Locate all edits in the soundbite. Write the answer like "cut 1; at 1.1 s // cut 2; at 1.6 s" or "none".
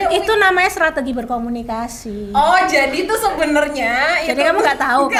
none